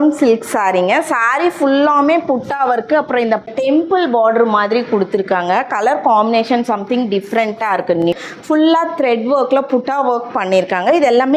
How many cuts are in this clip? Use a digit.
2